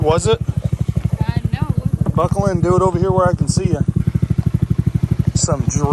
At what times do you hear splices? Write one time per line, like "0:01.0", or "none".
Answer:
0:04.0